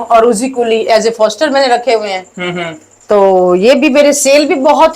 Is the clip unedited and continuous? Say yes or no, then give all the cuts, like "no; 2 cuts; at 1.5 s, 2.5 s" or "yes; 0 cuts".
yes; 0 cuts